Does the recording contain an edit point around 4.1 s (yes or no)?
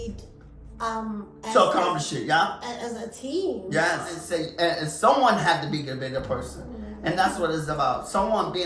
yes